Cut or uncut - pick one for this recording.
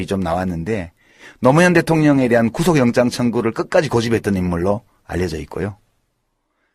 uncut